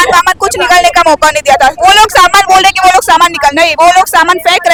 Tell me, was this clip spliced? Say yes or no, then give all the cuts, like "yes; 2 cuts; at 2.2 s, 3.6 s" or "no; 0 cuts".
no; 0 cuts